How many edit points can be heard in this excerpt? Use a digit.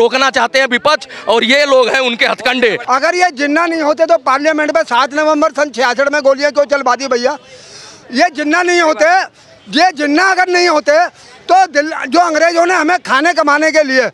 1